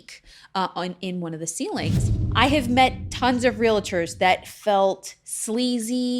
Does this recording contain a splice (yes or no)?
yes